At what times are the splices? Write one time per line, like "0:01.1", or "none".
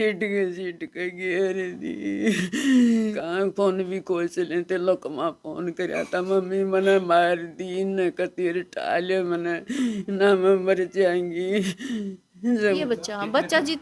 0:03.2
0:12.8